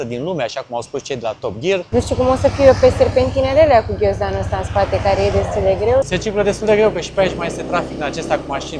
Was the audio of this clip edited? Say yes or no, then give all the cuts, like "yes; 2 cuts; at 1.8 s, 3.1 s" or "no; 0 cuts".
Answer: yes; 2 cuts; at 1.9 s, 6.0 s